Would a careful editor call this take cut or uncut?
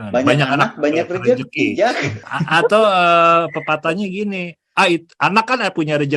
cut